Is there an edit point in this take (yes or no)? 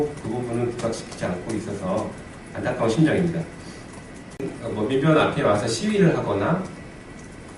no